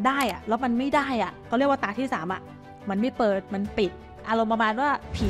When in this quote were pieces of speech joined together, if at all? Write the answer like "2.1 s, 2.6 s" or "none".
1.5 s, 4.1 s